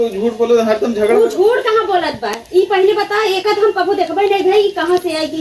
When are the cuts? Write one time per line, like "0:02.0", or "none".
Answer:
none